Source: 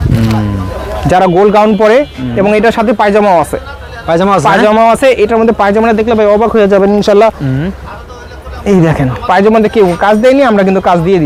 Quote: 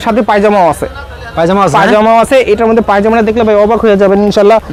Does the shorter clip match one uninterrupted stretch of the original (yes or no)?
yes